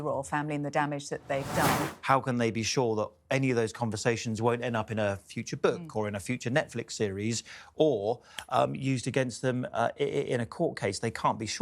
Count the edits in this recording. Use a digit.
1